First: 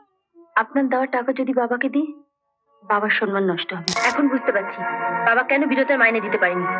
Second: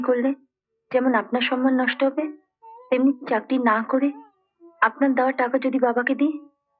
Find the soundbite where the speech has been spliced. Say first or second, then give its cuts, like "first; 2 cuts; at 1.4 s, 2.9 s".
first; 1 cut; at 4.0 s